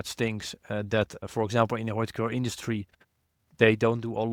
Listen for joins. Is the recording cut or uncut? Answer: uncut